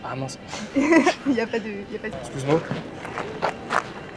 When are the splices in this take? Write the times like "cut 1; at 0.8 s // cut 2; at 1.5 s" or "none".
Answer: cut 1; at 2.1 s